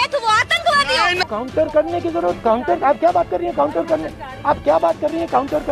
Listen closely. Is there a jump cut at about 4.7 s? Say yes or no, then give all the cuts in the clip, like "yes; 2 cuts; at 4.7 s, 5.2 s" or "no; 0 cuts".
no; 1 cut; at 1.2 s